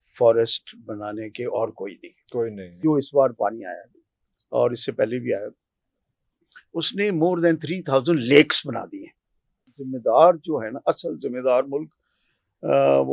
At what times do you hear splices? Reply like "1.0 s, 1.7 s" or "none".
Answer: 2.8 s, 9.7 s